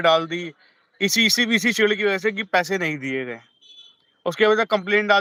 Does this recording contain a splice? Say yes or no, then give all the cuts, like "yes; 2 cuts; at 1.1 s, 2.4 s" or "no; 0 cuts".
no; 0 cuts